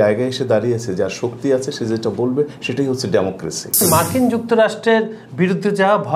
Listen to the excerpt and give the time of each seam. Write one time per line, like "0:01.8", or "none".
0:03.8